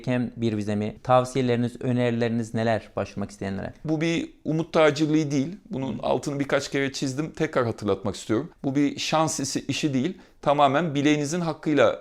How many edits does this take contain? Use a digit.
3